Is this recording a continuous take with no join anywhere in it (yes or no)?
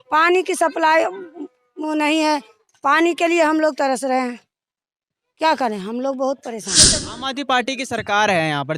no